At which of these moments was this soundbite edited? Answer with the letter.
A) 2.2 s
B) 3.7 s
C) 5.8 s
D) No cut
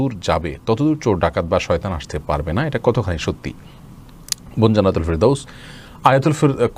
D